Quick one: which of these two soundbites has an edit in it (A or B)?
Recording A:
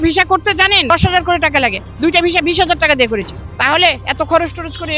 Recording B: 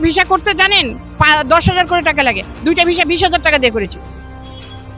A